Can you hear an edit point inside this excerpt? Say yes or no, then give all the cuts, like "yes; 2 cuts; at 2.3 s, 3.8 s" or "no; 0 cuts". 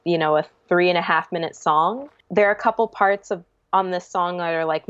yes; 1 cut; at 2.1 s